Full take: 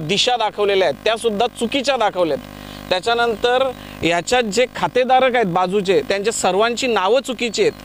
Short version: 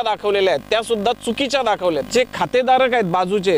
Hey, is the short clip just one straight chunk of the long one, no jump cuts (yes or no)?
no